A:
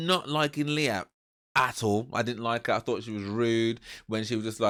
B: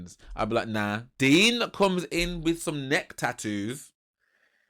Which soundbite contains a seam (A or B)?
B